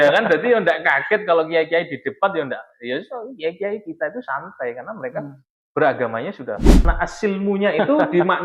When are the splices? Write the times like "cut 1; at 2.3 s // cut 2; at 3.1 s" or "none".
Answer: cut 1; at 6.8 s